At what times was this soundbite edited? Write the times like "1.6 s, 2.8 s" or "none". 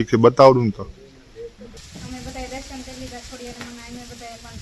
1.7 s